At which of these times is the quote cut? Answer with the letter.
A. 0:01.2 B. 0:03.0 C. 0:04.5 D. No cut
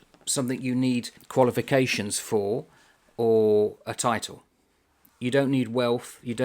A